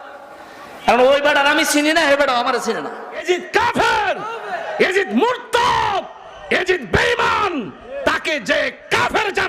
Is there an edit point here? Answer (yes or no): yes